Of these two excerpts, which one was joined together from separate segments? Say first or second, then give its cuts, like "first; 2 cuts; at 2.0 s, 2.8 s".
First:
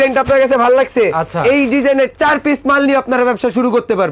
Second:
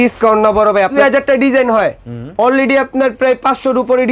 second; 1 cut; at 0.9 s